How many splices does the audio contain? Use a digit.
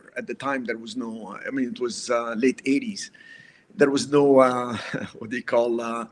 0